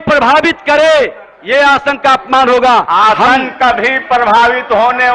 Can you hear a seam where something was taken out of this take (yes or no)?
no